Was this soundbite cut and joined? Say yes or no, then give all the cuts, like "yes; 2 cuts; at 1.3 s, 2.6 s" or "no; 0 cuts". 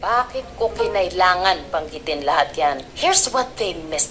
yes; 1 cut; at 2.9 s